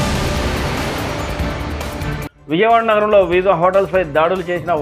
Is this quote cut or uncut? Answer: cut